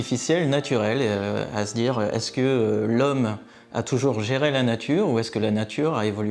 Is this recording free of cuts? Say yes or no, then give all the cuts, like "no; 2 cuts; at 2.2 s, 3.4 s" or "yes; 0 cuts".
yes; 0 cuts